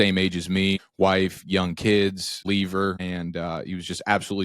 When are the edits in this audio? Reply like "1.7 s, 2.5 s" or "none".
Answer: 0.9 s, 2.4 s, 3.0 s